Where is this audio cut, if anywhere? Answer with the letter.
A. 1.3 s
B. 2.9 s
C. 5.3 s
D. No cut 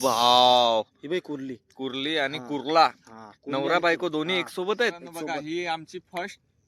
C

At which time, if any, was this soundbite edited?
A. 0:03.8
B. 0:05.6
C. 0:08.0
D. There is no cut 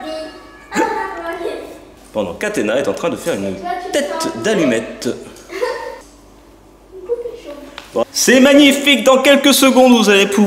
C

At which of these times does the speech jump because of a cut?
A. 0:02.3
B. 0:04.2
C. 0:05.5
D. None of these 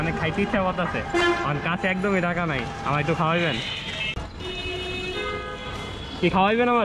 B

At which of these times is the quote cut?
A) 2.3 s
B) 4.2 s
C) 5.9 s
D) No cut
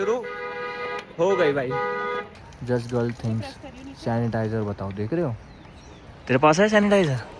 A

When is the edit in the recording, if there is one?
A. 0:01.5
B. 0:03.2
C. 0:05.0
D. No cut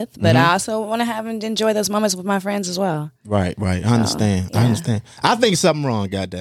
D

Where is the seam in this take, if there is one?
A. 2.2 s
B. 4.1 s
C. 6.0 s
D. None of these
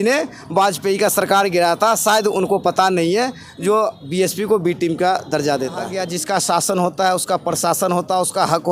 C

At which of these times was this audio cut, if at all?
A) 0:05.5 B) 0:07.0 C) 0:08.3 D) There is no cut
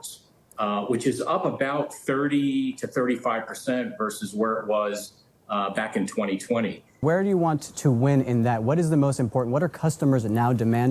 B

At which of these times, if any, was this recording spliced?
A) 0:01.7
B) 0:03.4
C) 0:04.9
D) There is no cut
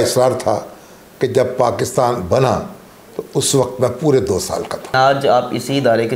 C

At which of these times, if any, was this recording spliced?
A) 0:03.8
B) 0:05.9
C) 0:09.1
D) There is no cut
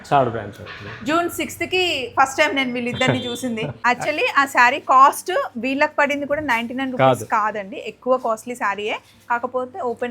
A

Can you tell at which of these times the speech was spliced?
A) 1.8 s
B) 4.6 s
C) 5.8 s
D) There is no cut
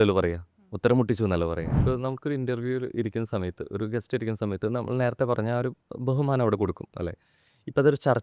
A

